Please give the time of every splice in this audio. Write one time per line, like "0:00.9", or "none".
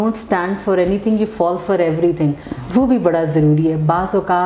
none